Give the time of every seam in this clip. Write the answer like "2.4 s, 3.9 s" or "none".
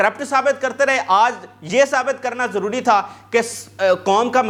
none